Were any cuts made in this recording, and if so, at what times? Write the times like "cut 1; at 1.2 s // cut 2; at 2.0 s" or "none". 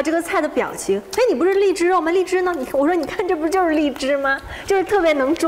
none